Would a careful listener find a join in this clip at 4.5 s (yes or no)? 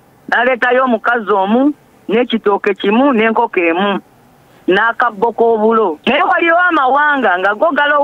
no